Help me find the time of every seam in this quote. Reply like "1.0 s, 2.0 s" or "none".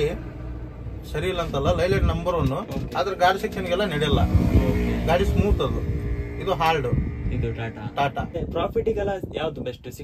8.3 s